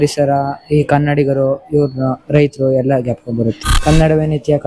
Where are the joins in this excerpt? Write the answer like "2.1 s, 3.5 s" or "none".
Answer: 3.7 s